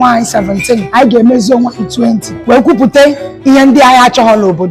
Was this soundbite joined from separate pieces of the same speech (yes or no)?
yes